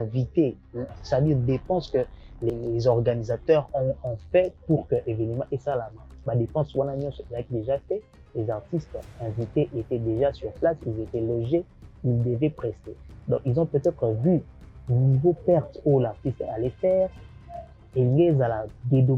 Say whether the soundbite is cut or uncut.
cut